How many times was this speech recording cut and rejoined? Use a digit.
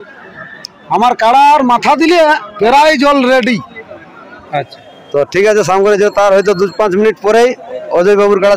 2